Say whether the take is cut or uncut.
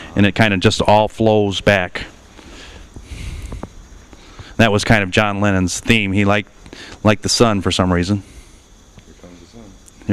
cut